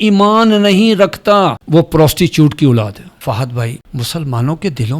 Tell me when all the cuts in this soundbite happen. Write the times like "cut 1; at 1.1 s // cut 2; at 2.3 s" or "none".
cut 1; at 1.6 s // cut 2; at 3.1 s // cut 3; at 3.8 s